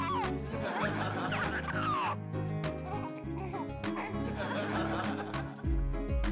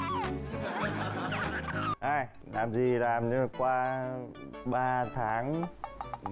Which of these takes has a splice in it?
second; 1 cut; at 1.9 s

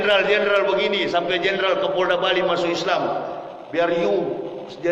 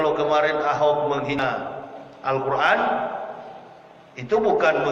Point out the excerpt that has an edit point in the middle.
second; 1 cut; at 1.4 s

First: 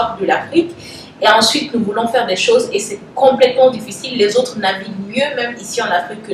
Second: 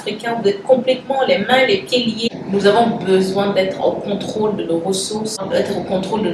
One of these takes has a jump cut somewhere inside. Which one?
second; 1 cut; at 2.2 s

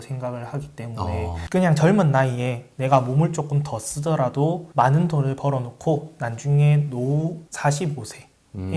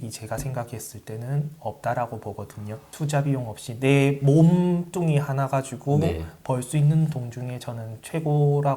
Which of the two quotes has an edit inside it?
first; 2 cuts; at 1.4 s, 7.4 s

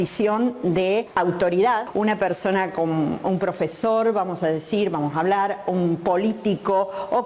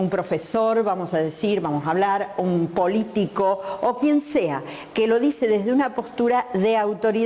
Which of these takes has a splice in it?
first; 2 cuts; at 1.1 s, 1.9 s

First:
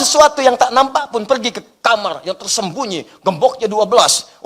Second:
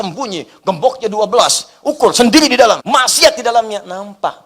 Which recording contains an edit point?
second; 1 cut; at 2.8 s

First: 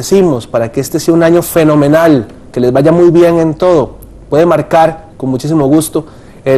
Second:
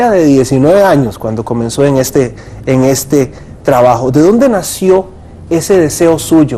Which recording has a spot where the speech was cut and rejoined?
first; 1 cut; at 5.7 s

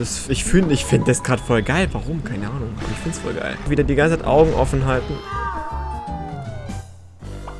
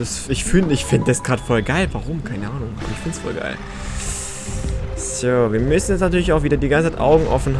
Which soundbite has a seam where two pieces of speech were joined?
first; 1 cut; at 3.7 s

